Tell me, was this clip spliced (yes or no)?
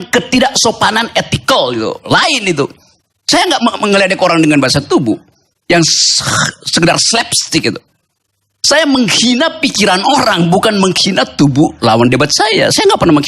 no